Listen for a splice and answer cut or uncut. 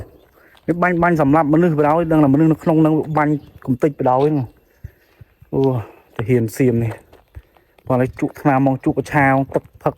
uncut